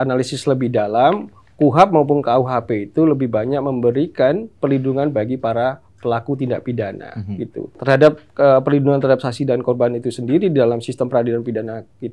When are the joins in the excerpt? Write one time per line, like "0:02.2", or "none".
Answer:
none